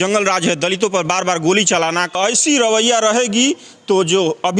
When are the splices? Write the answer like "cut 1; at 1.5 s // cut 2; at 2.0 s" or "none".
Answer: cut 1; at 2.1 s